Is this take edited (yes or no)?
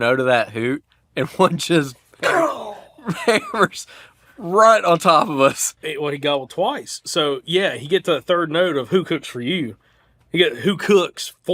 yes